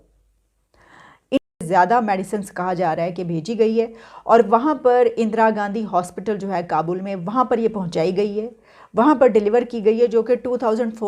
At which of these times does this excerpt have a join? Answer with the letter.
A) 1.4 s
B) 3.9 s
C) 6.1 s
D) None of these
A